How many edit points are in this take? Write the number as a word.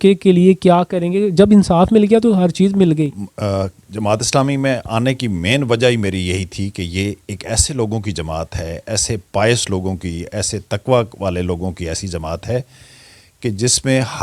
one